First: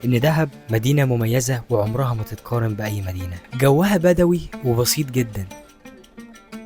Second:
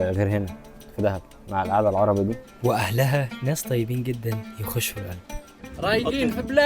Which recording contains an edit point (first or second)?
second